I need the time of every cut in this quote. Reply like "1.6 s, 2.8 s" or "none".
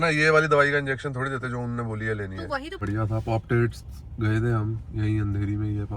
2.8 s